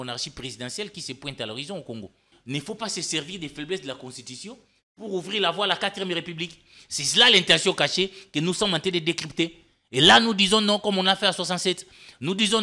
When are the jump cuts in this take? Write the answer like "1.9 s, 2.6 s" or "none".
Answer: 2.3 s

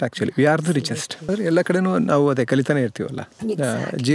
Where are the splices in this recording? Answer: 1.2 s

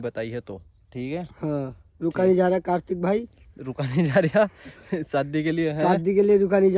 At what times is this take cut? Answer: none

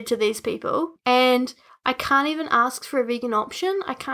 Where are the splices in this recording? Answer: 0.9 s, 1.7 s

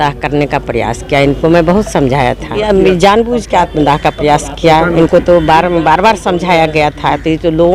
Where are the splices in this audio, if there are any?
2.6 s

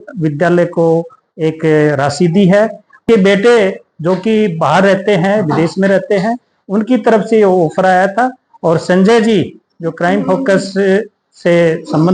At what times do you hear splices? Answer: 3.0 s

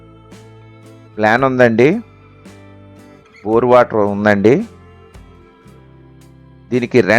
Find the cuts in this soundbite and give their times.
4.7 s, 6.2 s

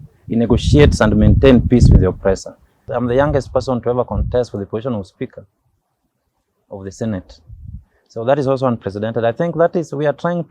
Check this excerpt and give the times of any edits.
2.8 s

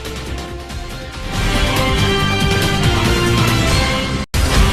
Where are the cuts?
3.3 s

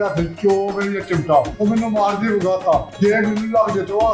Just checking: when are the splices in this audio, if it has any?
1.5 s, 2.9 s

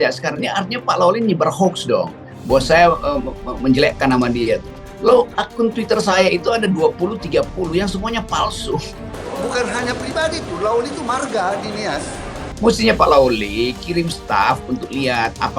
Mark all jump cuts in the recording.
9.0 s, 12.4 s

